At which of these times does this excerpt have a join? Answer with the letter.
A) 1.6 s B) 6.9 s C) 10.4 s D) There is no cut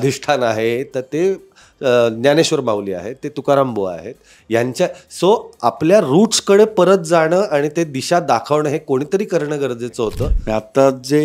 C